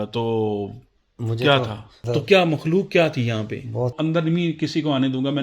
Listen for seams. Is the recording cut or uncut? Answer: cut